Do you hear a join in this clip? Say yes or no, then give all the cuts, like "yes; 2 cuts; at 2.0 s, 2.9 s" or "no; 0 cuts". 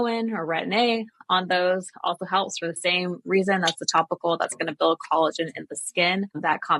no; 0 cuts